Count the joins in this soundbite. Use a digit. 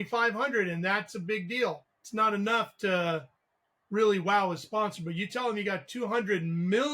1